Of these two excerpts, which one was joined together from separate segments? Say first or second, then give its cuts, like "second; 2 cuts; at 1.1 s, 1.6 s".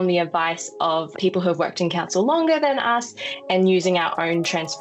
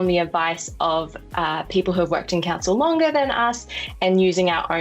first; 1 cut; at 1.1 s